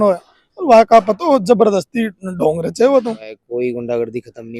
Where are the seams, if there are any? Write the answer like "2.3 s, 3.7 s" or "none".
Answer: 3.4 s